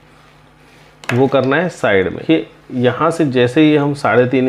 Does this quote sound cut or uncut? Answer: cut